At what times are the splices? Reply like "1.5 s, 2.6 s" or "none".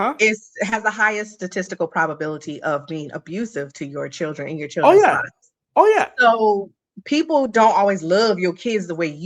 none